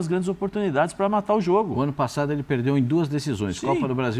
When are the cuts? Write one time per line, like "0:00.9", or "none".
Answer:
none